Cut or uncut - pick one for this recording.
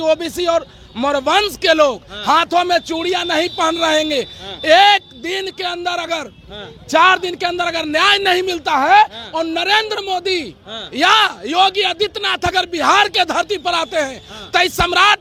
uncut